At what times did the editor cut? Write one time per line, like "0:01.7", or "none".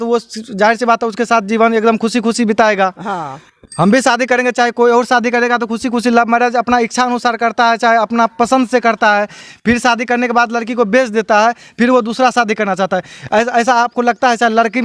none